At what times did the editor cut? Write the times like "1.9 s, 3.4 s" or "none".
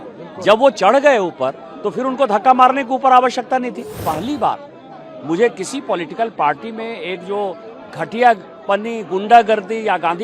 4.0 s